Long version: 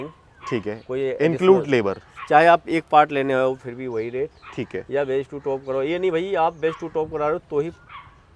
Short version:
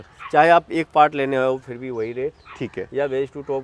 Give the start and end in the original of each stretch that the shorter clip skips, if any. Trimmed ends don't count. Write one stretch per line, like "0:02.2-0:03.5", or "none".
none